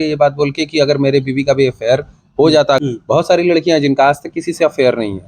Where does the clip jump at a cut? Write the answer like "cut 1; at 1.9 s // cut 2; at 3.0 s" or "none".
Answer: cut 1; at 2.8 s